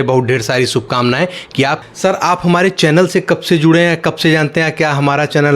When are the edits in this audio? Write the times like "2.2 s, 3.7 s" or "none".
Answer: 1.8 s